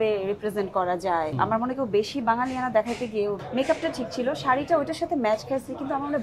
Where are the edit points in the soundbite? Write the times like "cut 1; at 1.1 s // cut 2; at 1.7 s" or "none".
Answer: cut 1; at 1.3 s // cut 2; at 3.4 s